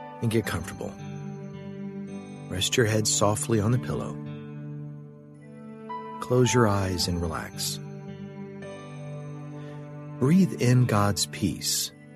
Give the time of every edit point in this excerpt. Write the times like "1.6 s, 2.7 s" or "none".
0.9 s, 2.5 s, 4.1 s, 5.9 s